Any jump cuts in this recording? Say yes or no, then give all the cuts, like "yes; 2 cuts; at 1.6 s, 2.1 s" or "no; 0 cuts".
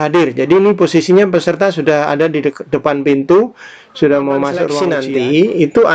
yes; 1 cut; at 4.8 s